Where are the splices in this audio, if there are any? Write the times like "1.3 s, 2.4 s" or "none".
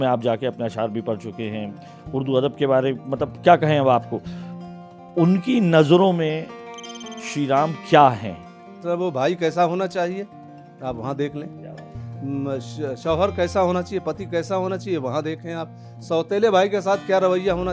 8.7 s